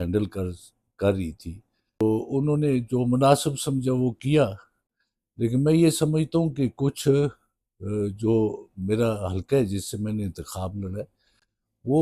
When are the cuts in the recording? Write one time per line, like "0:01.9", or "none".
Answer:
0:02.0